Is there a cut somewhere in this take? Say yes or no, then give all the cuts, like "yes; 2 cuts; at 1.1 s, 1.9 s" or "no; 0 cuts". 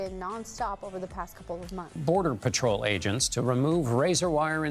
no; 0 cuts